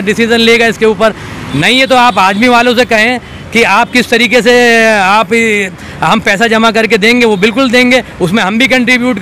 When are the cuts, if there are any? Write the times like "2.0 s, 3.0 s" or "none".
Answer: none